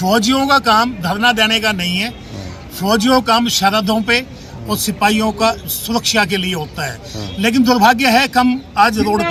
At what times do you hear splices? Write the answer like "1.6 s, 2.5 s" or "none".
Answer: none